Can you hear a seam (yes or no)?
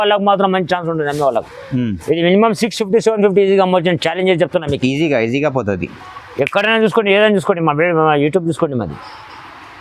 no